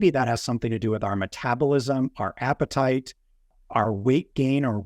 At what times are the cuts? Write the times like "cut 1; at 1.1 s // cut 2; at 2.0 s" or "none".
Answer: cut 1; at 3.5 s